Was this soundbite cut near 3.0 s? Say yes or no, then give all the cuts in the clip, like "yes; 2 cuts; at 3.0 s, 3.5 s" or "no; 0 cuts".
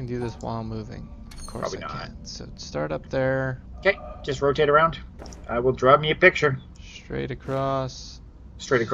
no; 0 cuts